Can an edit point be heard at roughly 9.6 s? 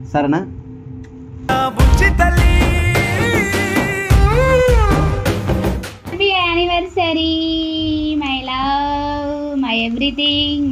no; 1 cut; at 6.1 s

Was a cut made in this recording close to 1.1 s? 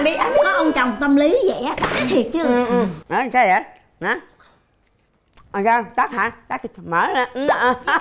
no; 0 cuts

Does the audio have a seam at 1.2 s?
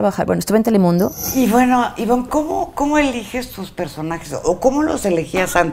yes; 1 cut; at 1.2 s

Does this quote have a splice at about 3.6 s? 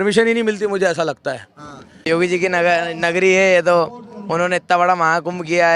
no; 1 cut; at 2.0 s

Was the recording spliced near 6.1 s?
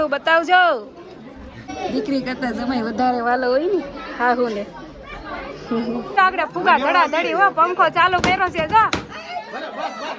yes; 2 cuts; at 1.6 s, 6.1 s

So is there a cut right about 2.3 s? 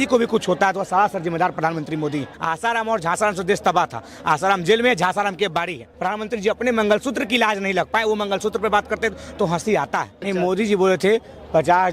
yes; 3 cuts; at 2.3 s, 5.9 s, 10.2 s

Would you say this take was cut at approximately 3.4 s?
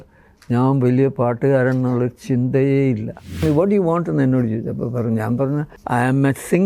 yes; 2 cuts; at 3.4 s, 5.8 s

